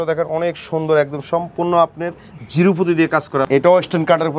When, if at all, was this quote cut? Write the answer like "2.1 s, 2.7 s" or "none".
3.5 s